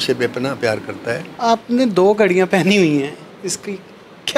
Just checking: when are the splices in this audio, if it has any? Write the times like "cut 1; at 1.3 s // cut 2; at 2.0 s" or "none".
cut 1; at 1.3 s